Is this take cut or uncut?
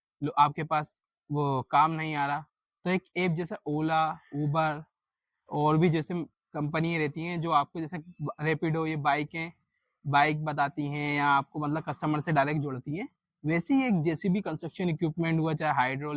uncut